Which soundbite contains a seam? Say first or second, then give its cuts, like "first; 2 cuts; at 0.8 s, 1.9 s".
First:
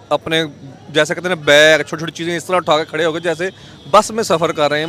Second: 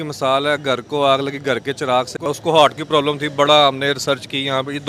second; 1 cut; at 2.2 s